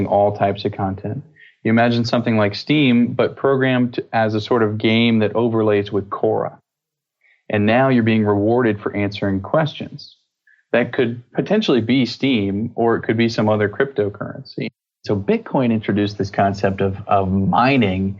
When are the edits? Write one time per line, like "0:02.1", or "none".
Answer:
0:15.0

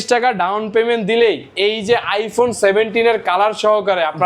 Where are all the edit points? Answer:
none

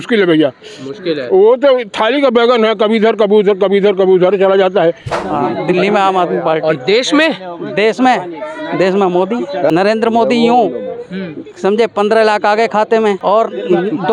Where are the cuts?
0:05.1
0:09.7
0:13.2

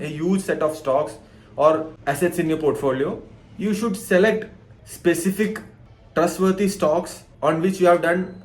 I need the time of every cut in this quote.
0:01.9

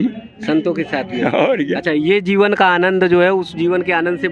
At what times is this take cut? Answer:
none

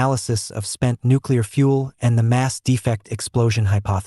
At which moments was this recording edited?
0:01.5

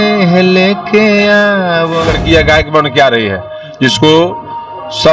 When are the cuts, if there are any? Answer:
0:02.1

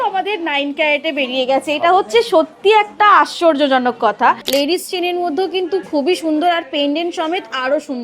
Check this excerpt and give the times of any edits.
0:04.4

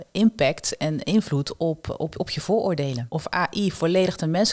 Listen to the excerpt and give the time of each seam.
0:03.0

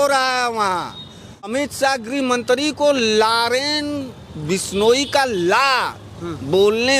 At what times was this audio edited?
0:01.5

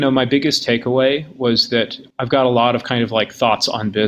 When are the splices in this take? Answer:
0:02.0

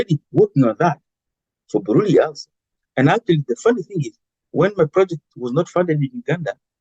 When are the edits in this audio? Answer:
none

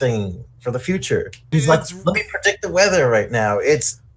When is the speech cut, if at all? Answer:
0:01.4

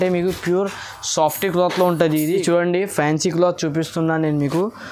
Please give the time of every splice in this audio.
0:02.4

